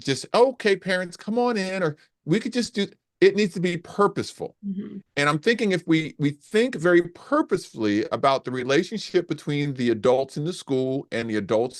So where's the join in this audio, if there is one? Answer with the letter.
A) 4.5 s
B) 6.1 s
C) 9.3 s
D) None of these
A